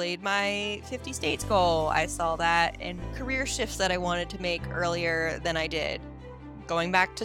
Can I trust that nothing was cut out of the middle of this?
no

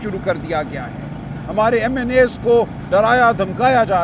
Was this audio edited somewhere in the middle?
no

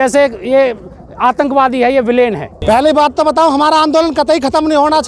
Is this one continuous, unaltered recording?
no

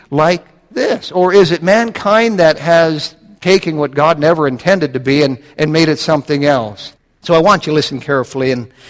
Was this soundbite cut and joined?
yes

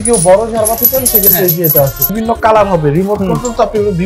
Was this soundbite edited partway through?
yes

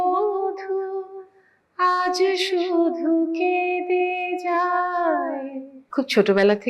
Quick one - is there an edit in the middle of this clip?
yes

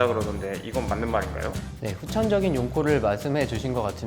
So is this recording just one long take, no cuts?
no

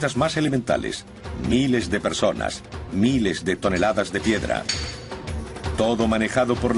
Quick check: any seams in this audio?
yes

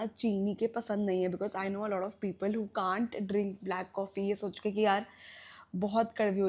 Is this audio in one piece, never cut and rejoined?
yes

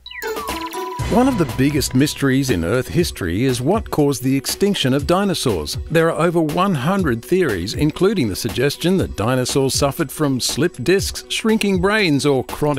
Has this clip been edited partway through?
no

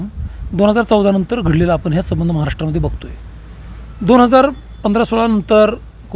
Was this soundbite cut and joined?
no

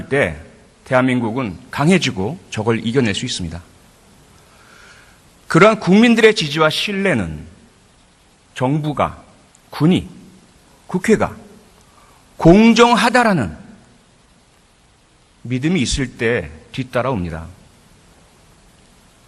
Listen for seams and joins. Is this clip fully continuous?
no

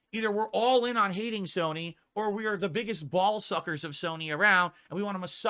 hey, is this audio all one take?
yes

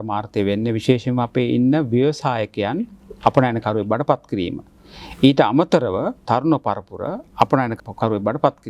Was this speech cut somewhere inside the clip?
yes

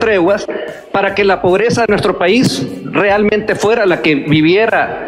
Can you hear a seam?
no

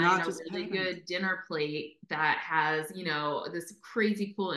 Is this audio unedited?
yes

